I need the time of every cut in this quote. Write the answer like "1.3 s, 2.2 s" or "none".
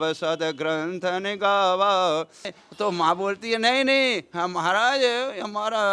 2.6 s